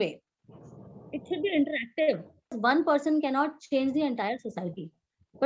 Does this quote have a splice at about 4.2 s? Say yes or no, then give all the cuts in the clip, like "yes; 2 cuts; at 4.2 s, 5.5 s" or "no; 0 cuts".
no; 1 cut; at 2.6 s